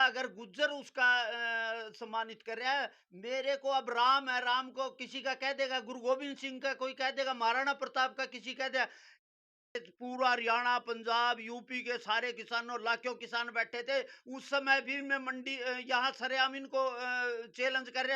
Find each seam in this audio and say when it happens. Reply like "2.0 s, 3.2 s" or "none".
9.5 s